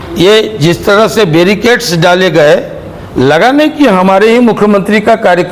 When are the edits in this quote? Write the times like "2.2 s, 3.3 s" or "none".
none